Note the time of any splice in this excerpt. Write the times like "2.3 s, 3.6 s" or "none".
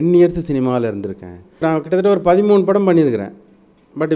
1.6 s